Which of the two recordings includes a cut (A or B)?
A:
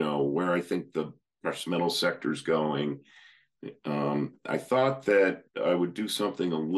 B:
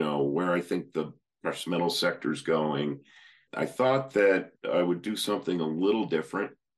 B